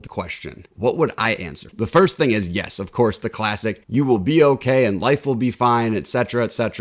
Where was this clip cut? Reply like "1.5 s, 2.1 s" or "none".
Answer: 1.7 s